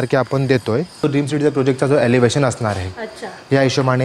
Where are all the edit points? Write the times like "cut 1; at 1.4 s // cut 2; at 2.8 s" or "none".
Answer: cut 1; at 1.0 s